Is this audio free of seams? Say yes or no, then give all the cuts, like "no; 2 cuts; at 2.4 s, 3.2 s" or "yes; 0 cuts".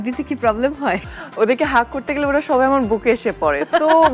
no; 1 cut; at 1.1 s